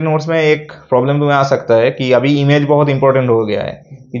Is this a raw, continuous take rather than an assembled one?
yes; 0 cuts

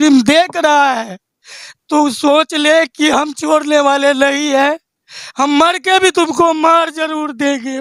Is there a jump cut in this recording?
no; 0 cuts

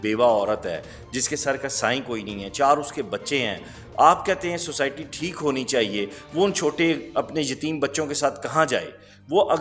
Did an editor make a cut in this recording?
no; 0 cuts

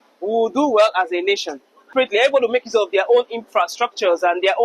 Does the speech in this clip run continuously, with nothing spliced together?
no; 1 cut; at 1.9 s

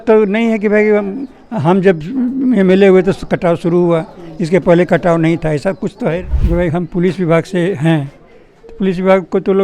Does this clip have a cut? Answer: yes; 1 cut; at 6.2 s

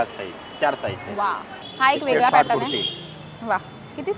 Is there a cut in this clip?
no; 0 cuts

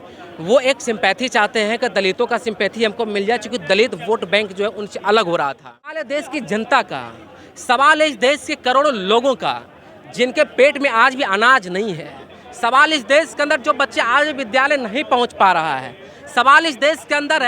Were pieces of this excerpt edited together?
yes; 1 cut; at 6.0 s

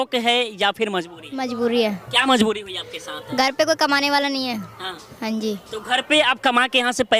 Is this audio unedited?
yes; 0 cuts

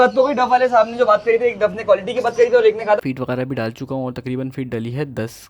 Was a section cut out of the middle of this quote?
yes; 1 cut; at 3.0 s

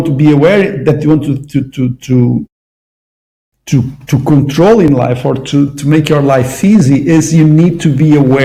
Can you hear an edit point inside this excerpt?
no; 0 cuts

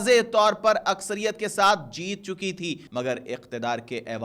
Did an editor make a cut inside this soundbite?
yes; 1 cut; at 2.8 s

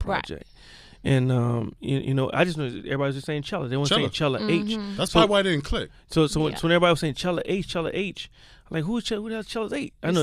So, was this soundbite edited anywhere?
yes; 1 cut; at 4.0 s

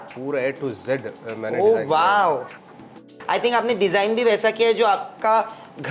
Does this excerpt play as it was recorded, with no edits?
no; 1 cut; at 3.1 s

